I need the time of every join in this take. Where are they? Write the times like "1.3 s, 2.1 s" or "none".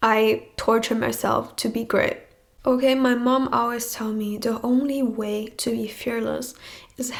none